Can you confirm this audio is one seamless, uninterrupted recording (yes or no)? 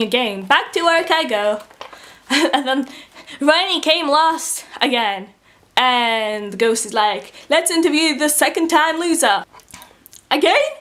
yes